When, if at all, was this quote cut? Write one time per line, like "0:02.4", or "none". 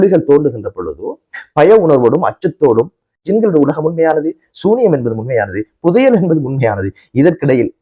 0:03.2